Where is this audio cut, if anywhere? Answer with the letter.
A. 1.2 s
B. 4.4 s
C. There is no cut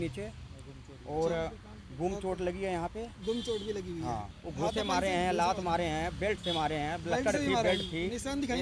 B